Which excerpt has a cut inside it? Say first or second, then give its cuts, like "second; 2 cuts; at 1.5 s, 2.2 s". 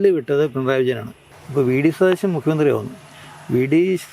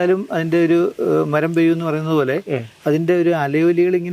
first; 1 cut; at 1.1 s